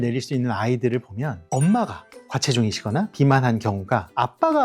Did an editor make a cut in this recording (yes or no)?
yes